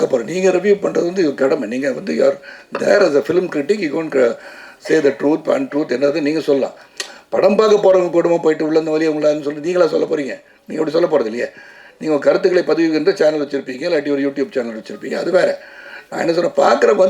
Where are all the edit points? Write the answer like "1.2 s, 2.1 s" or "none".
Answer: none